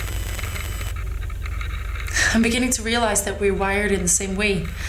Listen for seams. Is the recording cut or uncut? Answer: cut